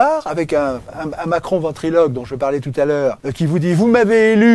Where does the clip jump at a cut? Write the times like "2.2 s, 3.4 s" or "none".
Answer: 3.3 s